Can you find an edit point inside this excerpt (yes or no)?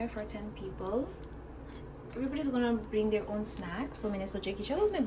no